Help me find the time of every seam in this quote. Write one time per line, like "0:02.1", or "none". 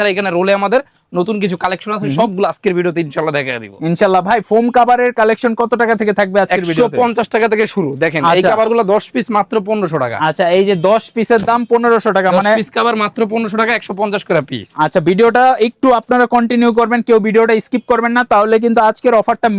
none